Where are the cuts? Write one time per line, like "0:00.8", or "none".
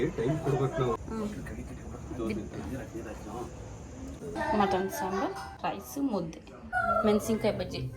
0:04.4